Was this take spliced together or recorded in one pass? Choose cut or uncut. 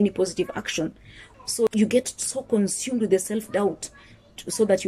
cut